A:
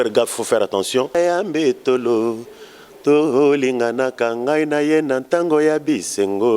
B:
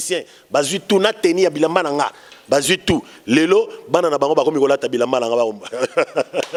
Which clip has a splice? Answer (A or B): A